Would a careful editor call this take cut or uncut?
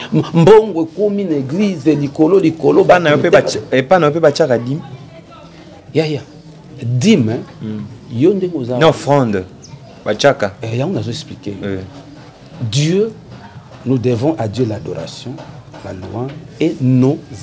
uncut